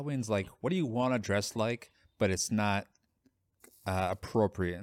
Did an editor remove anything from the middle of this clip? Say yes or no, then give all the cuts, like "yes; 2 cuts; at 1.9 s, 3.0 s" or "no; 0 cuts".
no; 0 cuts